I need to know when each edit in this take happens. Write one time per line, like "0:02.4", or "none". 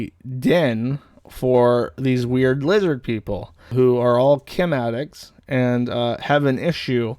0:03.6